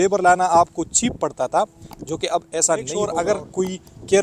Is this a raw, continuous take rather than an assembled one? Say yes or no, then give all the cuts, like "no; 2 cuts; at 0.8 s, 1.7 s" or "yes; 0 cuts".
no; 1 cut; at 3.1 s